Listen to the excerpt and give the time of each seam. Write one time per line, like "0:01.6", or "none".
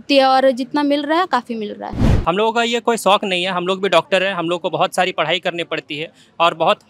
0:02.1